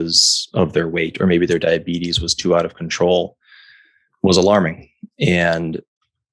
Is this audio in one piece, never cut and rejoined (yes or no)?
yes